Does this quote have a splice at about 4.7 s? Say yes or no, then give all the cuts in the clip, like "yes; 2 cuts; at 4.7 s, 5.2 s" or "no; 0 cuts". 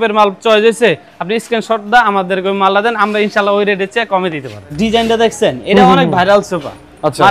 yes; 1 cut; at 4.7 s